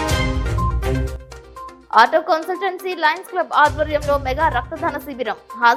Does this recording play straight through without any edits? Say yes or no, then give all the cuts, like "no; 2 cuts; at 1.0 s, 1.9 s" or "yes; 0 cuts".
yes; 0 cuts